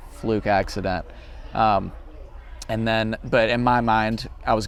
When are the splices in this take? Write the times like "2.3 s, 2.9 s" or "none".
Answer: none